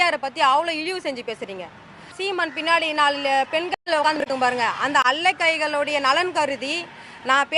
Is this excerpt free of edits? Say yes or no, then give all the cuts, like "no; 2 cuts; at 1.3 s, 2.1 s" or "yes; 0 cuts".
no; 1 cut; at 2.1 s